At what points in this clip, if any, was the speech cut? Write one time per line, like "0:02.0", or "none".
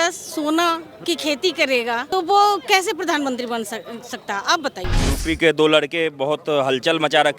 0:00.9
0:02.0
0:05.1